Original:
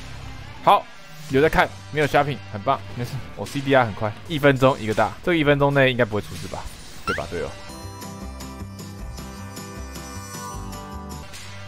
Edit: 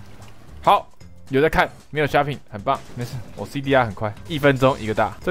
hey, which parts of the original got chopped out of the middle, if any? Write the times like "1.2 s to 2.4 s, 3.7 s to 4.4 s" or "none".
none